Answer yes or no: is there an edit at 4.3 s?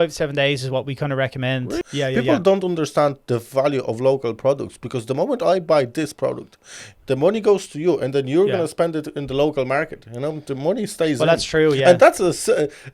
no